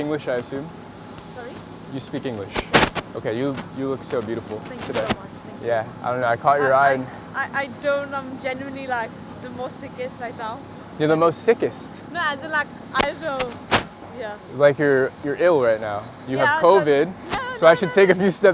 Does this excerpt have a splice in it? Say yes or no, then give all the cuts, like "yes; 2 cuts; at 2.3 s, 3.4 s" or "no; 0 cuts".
no; 0 cuts